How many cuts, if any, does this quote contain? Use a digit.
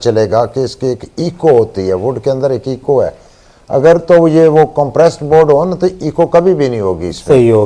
0